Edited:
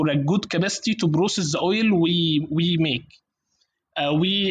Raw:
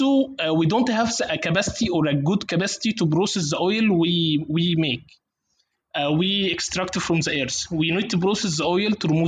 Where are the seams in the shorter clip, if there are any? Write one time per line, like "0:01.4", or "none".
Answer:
none